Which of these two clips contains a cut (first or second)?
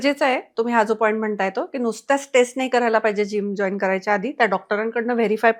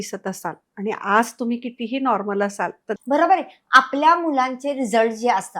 second